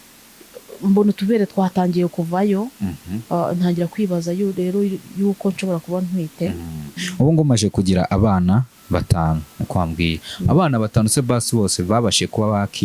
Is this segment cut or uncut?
cut